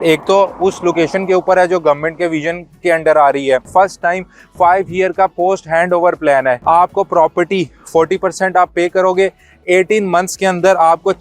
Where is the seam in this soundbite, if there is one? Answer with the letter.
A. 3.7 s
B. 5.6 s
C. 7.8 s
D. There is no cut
A